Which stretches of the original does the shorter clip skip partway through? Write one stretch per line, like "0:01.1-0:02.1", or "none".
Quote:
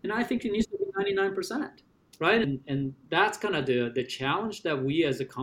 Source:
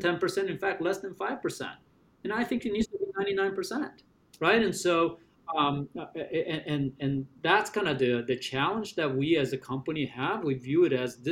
0:04.6-0:06.8